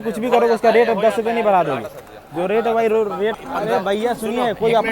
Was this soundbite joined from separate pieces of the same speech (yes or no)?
yes